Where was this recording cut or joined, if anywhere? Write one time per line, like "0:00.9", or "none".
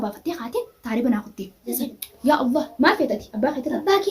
0:01.8